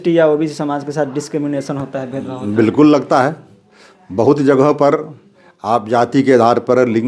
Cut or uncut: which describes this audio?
uncut